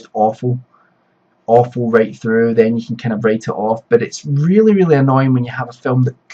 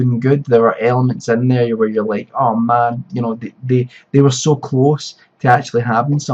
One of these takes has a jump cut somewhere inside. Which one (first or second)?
first